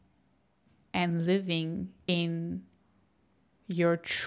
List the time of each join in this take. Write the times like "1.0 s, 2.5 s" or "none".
2.0 s